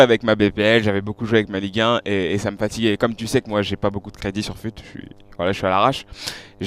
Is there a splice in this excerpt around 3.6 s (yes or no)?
yes